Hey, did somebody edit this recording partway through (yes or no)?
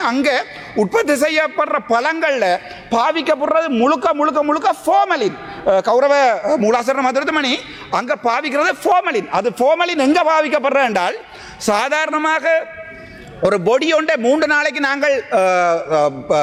no